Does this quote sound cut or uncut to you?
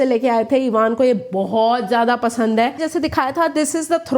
cut